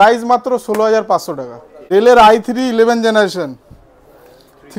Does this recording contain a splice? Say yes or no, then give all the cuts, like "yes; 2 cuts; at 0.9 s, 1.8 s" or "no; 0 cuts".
yes; 1 cut; at 1.8 s